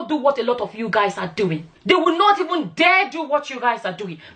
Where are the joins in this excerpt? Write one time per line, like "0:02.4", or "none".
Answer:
0:01.7